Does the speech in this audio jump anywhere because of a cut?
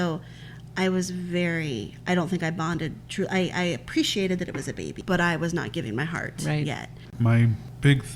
yes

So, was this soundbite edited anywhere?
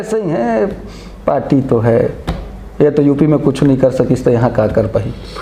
no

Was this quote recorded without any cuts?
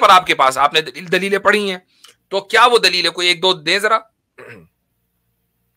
yes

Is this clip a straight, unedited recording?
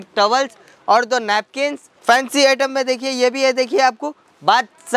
no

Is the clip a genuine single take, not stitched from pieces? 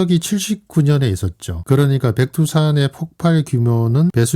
no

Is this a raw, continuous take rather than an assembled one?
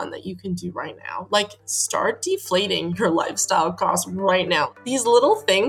no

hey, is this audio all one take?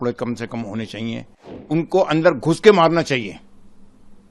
no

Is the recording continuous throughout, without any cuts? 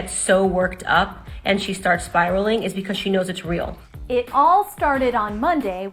no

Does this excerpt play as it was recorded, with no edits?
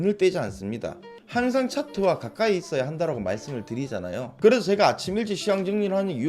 no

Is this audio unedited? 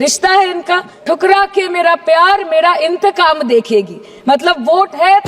no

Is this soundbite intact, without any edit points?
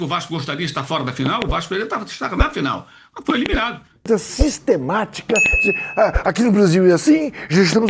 no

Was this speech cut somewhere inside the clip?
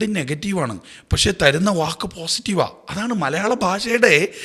no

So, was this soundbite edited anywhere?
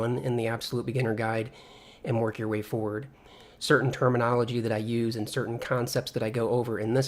yes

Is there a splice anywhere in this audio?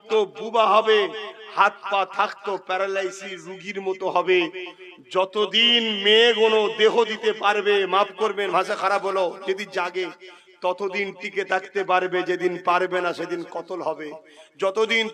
no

